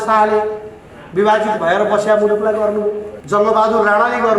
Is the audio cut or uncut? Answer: cut